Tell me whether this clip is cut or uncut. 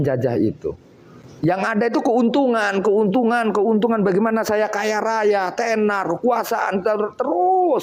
uncut